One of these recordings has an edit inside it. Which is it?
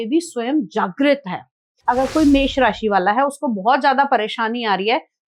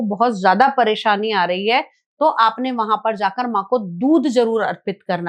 first; 1 cut; at 1.8 s

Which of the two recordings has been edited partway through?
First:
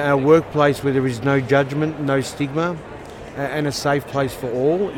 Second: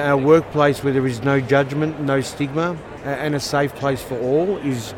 second; 1 cut; at 2.9 s

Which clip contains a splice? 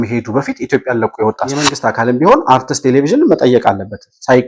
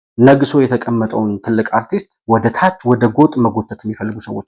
first; 1 cut; at 1.7 s

